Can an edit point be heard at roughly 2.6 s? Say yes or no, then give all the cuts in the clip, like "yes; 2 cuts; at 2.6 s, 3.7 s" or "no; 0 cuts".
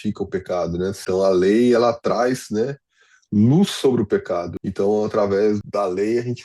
no; 3 cuts; at 1.0 s, 4.5 s, 5.6 s